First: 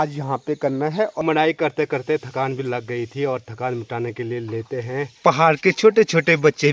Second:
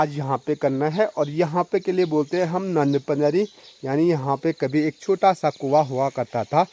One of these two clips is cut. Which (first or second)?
first